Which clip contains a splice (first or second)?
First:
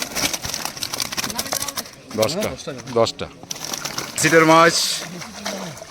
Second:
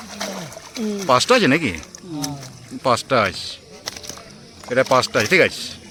first